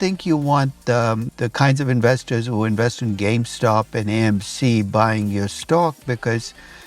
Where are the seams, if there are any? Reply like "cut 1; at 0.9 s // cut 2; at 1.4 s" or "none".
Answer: cut 1; at 1.3 s